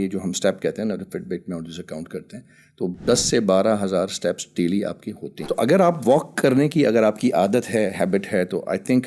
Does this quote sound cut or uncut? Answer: cut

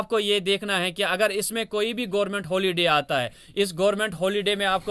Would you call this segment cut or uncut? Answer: uncut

